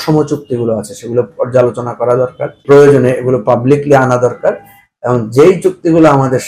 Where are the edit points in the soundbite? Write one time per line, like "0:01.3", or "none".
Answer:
0:02.5